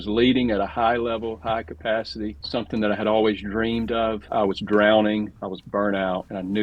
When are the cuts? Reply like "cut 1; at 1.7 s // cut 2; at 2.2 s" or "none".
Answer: cut 1; at 4.2 s